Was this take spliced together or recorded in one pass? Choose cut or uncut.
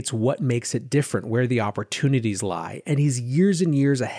uncut